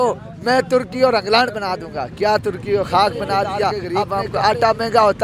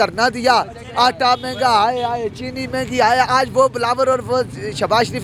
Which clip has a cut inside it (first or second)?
first